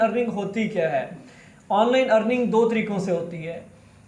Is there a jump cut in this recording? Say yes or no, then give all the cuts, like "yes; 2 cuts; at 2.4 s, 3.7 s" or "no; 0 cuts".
no; 0 cuts